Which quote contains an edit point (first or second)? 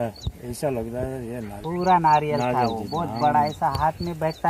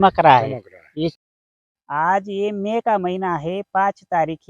second